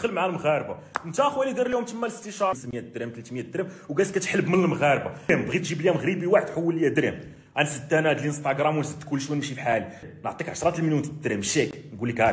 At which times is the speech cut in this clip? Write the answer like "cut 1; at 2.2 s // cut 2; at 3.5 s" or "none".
cut 1; at 2.5 s // cut 2; at 5.3 s // cut 3; at 10.1 s